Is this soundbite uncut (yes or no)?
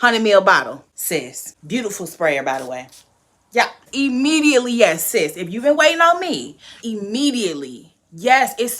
no